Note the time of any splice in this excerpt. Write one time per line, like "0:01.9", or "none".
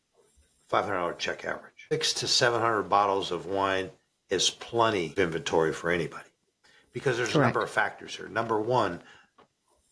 0:01.9
0:05.1